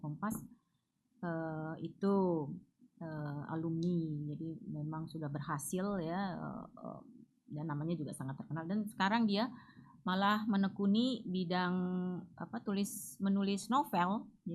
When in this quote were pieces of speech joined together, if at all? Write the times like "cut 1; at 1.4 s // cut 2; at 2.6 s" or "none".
none